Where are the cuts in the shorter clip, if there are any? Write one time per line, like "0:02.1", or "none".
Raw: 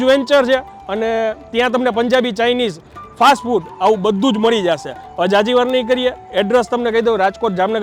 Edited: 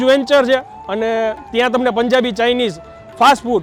none